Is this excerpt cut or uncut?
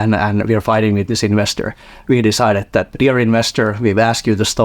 cut